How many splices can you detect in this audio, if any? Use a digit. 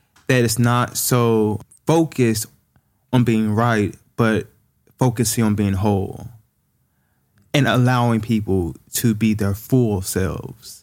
1